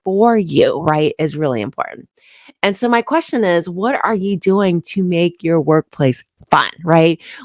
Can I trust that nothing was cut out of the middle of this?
yes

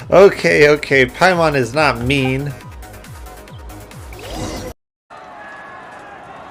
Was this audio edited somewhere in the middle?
no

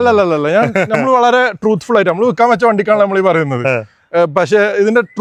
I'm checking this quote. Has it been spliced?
no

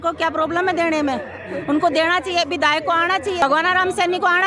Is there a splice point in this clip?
yes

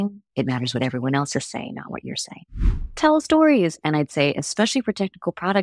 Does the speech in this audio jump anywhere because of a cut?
yes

